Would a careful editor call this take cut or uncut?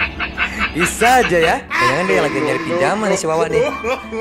cut